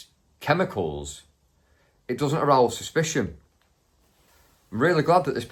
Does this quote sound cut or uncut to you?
uncut